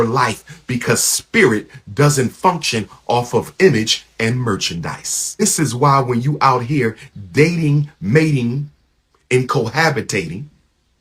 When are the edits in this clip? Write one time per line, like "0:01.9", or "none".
0:05.4